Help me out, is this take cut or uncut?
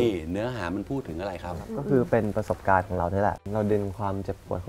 cut